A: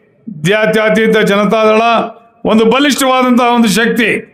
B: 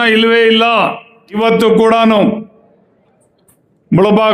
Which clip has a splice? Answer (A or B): B